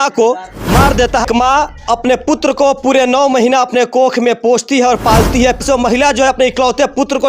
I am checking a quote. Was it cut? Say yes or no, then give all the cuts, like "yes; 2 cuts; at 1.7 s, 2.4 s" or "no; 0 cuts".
yes; 2 cuts; at 1.2 s, 5.6 s